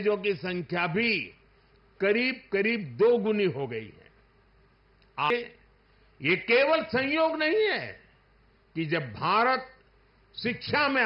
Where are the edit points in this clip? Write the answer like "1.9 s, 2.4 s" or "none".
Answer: 5.3 s